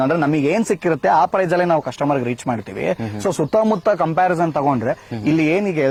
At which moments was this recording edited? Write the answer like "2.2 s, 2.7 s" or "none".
none